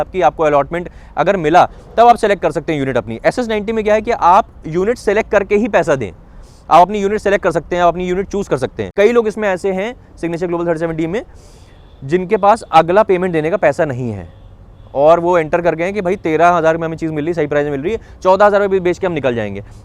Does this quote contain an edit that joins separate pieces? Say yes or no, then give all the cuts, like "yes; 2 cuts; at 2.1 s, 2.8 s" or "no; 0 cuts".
yes; 1 cut; at 8.9 s